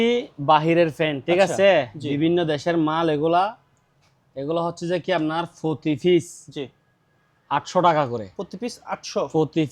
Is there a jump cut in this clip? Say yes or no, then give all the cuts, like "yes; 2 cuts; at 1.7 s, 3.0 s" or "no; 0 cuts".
no; 0 cuts